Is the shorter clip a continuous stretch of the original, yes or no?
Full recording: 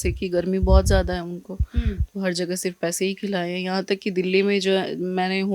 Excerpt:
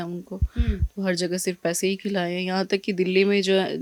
yes